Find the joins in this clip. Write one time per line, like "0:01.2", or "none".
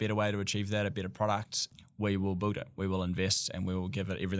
0:01.7